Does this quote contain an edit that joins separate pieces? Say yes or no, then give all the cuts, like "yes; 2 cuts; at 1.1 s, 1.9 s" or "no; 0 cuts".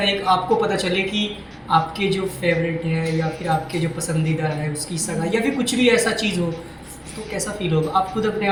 no; 0 cuts